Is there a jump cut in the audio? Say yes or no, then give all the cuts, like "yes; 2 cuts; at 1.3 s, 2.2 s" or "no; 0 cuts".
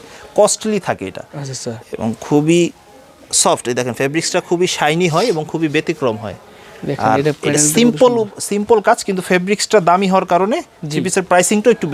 no; 0 cuts